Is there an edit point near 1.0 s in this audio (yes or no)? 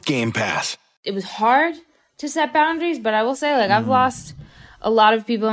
yes